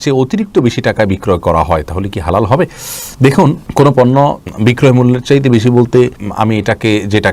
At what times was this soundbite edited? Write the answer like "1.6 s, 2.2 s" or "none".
none

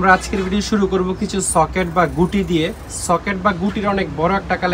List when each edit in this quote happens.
none

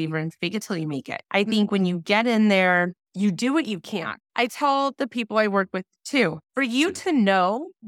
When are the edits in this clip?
1.2 s, 3.0 s, 4.1 s, 6.4 s

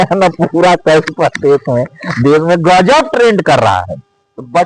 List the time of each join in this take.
none

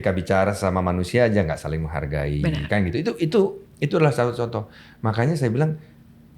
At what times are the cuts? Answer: none

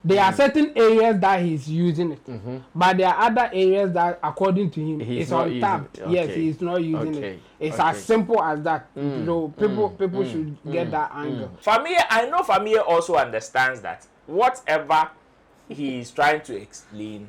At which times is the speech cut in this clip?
11.5 s

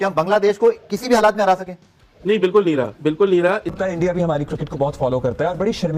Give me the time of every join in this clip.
3.7 s

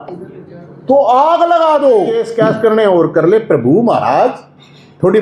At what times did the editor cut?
2.2 s

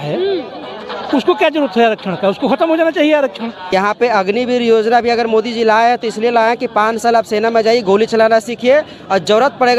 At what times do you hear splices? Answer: 3.6 s

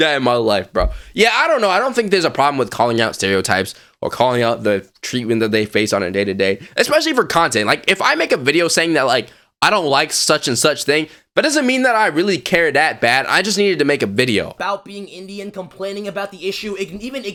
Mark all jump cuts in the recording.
none

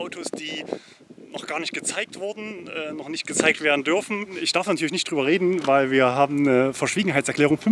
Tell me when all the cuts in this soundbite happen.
4.3 s

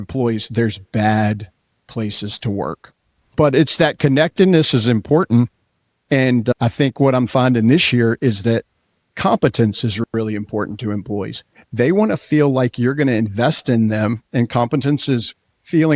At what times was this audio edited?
none

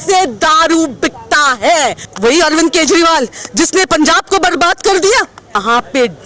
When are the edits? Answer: 2.0 s, 5.6 s

